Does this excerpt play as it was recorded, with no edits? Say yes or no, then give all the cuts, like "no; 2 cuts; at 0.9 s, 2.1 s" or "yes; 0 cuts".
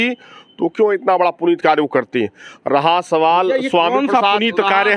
yes; 0 cuts